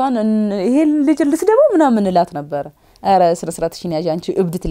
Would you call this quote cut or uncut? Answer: uncut